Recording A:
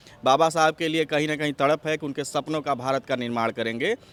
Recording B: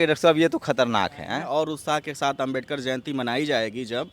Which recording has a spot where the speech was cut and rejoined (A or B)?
B